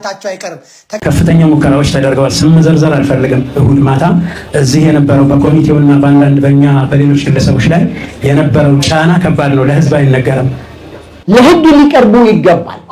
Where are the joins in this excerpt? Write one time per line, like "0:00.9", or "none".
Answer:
0:01.0
0:11.2